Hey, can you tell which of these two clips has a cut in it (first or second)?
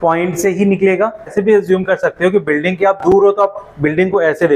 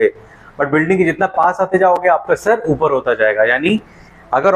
first